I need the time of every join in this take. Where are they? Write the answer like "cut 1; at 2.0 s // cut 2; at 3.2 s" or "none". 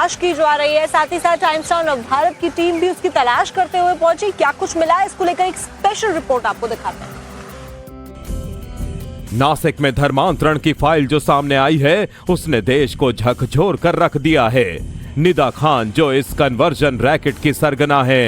cut 1; at 12.1 s